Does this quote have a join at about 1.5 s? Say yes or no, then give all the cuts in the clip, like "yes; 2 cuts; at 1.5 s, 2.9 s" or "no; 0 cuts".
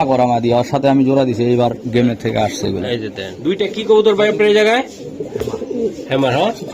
no; 1 cut; at 3.2 s